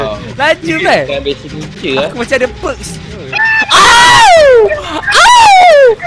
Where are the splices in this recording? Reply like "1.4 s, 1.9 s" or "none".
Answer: none